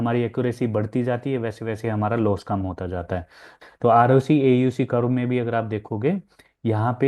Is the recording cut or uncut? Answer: cut